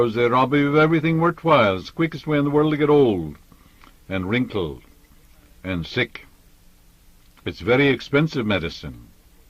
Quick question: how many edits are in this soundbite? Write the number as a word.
one